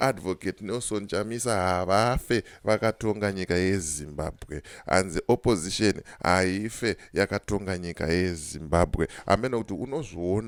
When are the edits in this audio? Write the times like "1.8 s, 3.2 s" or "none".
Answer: none